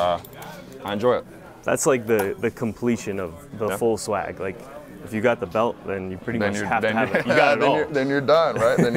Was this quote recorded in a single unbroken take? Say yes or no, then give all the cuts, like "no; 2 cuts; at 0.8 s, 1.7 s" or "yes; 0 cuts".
yes; 0 cuts